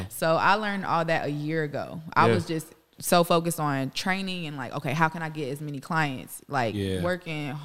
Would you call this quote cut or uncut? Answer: uncut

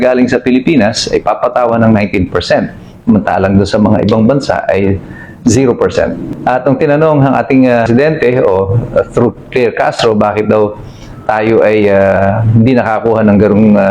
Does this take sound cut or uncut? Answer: cut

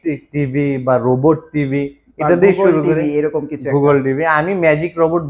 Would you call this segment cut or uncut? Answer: uncut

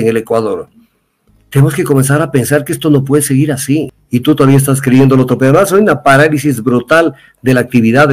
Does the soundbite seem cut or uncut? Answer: cut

